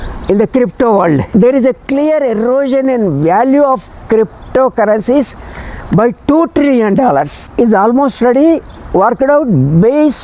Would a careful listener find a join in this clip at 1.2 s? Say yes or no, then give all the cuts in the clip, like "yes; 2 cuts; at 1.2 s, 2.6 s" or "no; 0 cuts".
yes; 2 cuts; at 1.2 s, 7.5 s